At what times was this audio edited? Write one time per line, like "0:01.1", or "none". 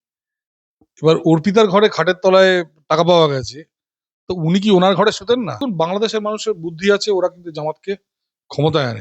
0:05.7